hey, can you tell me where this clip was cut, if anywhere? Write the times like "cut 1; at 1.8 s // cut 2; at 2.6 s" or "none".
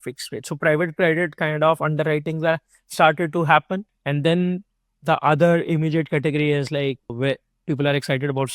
cut 1; at 3.9 s

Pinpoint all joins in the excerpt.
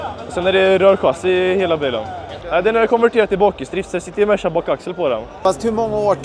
cut 1; at 2.5 s // cut 2; at 5.4 s

